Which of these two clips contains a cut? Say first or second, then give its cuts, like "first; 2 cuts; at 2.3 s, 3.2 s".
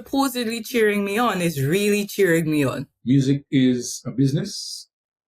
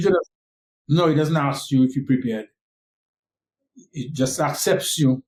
first; 1 cut; at 2.9 s